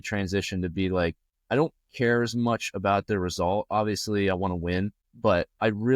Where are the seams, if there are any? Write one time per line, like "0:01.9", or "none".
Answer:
0:01.3
0:05.0